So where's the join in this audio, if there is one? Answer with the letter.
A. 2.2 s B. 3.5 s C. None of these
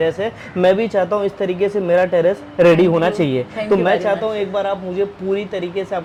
C